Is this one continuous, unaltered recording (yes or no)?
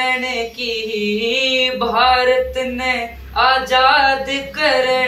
yes